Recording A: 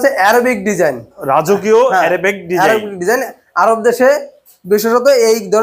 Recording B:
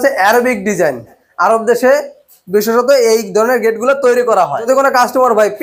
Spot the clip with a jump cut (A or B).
B